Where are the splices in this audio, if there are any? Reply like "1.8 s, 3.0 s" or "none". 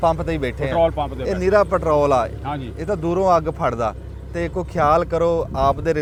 none